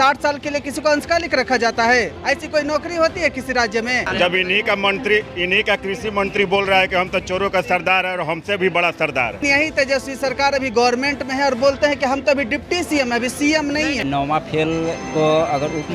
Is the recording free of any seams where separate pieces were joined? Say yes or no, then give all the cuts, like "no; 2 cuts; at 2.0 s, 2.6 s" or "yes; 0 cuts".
no; 3 cuts; at 4.1 s, 9.4 s, 14.0 s